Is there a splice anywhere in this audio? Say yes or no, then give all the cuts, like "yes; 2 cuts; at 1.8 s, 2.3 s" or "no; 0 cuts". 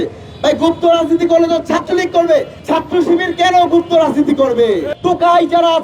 yes; 2 cuts; at 2.6 s, 4.9 s